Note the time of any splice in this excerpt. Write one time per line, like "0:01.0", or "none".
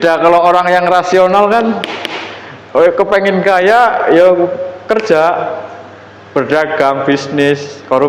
none